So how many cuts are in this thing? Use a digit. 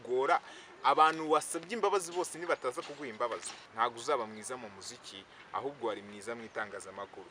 1